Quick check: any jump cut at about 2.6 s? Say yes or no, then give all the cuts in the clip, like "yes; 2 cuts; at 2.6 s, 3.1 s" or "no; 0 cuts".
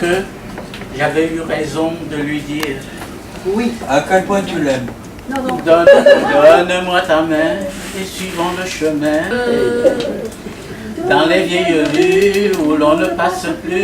no; 2 cuts; at 5.9 s, 9.3 s